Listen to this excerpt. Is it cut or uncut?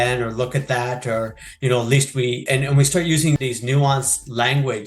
cut